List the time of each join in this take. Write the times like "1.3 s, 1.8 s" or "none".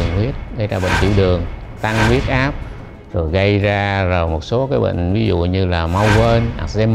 none